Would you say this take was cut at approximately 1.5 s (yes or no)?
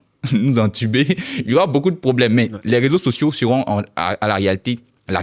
no